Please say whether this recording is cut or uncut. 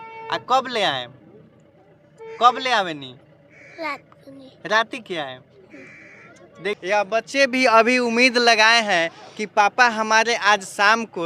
uncut